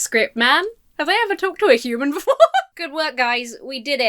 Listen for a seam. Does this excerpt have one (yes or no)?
yes